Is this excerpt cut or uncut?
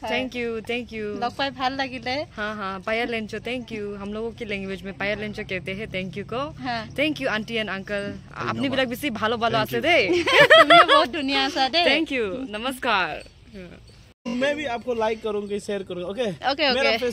cut